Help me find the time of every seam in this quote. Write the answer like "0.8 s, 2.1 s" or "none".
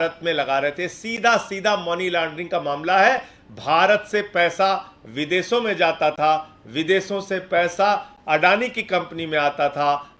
none